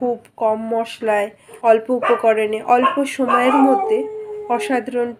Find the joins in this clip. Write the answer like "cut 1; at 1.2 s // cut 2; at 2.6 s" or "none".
cut 1; at 1.4 s